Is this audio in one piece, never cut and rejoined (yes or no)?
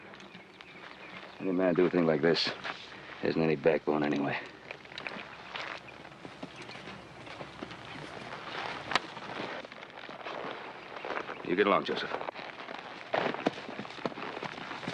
no